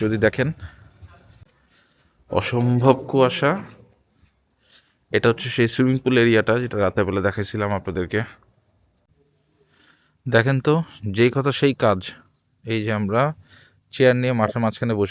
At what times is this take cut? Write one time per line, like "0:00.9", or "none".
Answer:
0:01.4
0:09.1